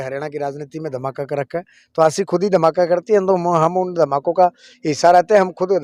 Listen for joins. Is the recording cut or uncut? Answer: uncut